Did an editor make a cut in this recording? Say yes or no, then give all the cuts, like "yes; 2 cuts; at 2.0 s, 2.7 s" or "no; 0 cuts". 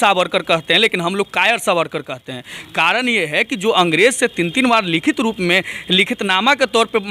no; 0 cuts